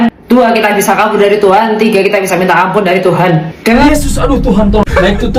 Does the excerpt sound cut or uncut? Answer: cut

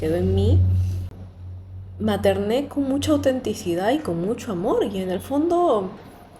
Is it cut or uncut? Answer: uncut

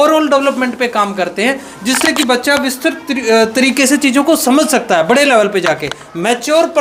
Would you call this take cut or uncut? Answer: uncut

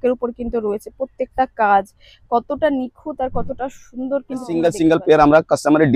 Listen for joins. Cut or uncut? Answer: cut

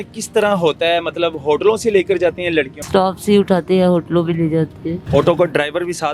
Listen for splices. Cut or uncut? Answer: cut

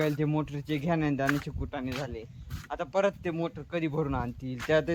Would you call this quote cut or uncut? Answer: uncut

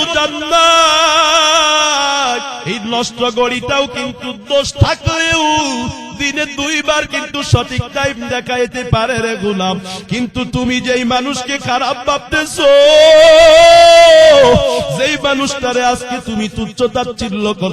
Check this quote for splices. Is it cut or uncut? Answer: cut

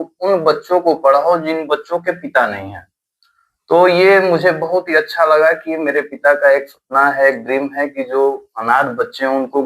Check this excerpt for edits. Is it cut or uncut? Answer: uncut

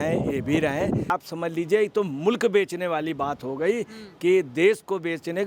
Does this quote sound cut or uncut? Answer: cut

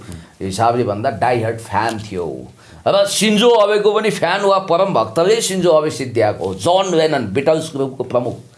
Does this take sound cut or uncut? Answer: uncut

